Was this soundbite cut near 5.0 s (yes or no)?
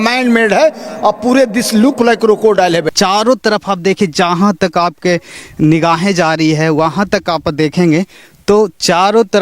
no